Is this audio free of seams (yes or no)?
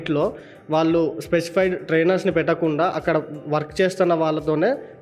yes